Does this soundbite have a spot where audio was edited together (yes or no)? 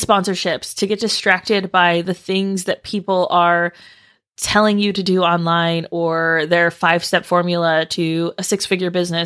no